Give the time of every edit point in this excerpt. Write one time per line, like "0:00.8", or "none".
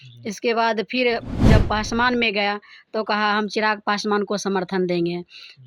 none